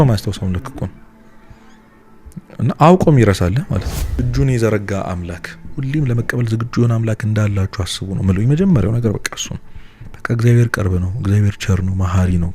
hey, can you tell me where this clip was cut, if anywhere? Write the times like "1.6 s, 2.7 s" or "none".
4.2 s